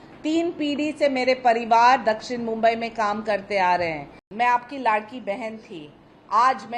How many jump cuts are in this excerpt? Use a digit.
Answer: 1